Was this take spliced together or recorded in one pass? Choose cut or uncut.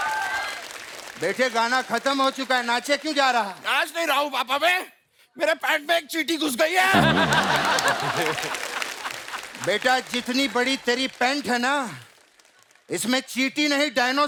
uncut